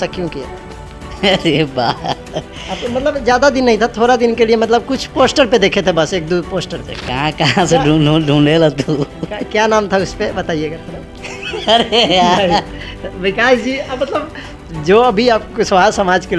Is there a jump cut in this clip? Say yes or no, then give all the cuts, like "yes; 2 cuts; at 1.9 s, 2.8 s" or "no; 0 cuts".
no; 0 cuts